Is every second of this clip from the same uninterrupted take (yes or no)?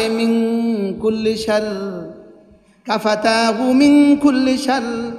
yes